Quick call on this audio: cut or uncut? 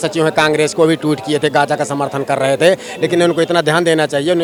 uncut